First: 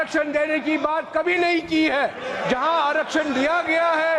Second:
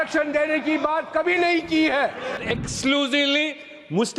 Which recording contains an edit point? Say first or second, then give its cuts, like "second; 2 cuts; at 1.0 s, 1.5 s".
second; 1 cut; at 2.4 s